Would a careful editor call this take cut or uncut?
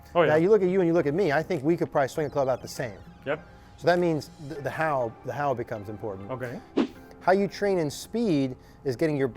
cut